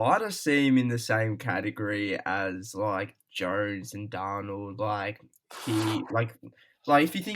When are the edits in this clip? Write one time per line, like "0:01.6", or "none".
none